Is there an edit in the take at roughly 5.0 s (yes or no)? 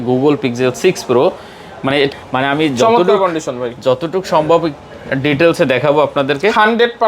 no